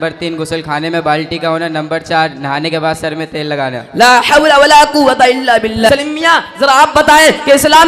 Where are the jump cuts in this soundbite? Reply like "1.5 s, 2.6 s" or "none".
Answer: 5.9 s